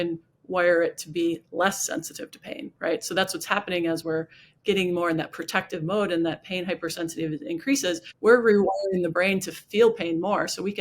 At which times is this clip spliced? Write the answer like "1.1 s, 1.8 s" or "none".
8.1 s